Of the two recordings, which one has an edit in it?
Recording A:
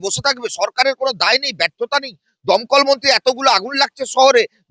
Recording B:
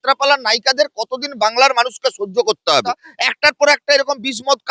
B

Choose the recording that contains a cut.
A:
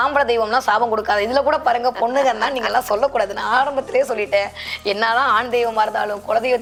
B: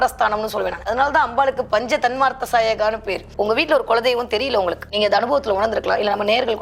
B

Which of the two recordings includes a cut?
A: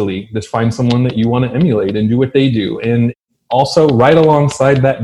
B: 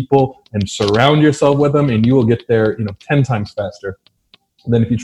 A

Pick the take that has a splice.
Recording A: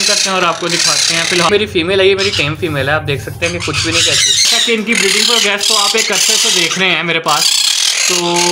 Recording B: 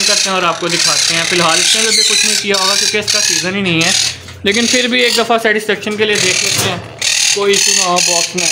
A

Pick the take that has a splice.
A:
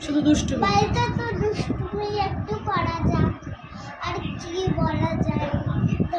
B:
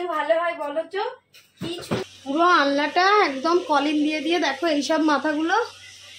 B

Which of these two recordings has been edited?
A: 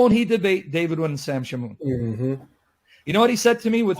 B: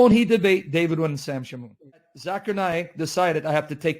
B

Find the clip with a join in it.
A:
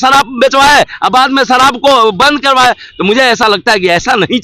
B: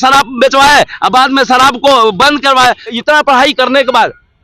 B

